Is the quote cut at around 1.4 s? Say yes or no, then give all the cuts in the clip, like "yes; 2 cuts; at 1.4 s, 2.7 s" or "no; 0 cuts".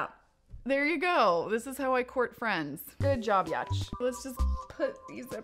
yes; 1 cut; at 1.4 s